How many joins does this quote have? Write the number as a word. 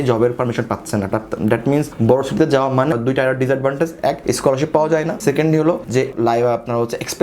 one